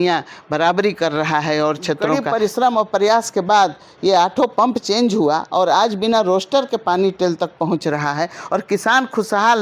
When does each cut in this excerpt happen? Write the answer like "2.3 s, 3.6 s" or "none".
2.2 s

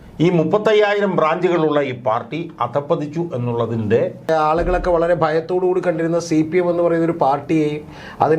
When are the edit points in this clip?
4.3 s

